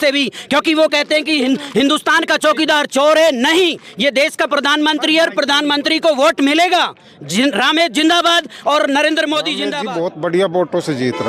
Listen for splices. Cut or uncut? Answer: cut